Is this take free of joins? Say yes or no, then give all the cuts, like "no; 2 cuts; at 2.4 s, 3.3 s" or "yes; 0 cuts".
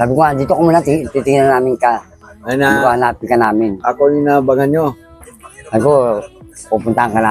yes; 0 cuts